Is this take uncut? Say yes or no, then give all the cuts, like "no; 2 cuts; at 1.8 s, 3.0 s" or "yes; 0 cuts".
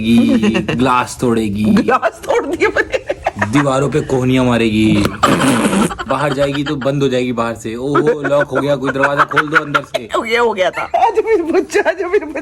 yes; 0 cuts